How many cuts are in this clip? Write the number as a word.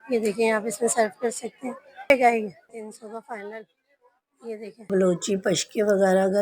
two